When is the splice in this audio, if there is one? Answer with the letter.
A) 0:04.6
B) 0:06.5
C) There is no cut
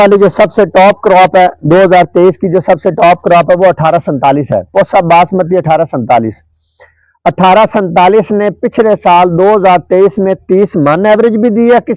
C